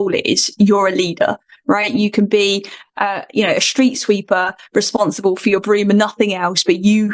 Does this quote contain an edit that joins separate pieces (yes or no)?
no